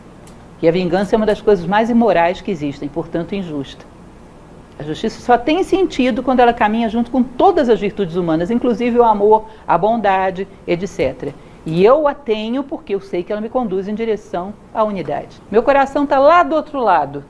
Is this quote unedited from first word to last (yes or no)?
no